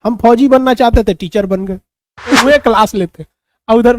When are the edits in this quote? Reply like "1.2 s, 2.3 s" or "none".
2.4 s